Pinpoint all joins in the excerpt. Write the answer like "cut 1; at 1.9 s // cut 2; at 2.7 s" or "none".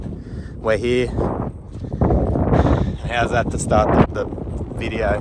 cut 1; at 4.1 s